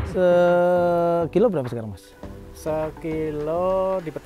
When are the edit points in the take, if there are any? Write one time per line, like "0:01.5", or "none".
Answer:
none